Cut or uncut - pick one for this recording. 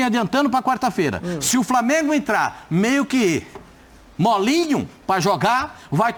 uncut